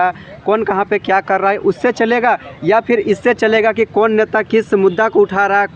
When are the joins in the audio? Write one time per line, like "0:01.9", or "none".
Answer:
none